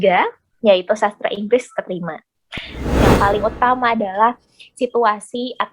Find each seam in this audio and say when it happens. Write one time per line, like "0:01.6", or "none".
0:03.0